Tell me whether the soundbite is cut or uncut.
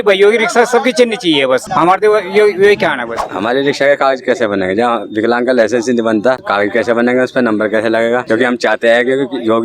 cut